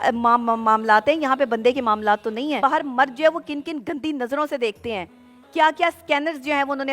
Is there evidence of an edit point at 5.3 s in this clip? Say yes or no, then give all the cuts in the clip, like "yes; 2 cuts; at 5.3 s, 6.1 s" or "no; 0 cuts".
no; 1 cut; at 2.6 s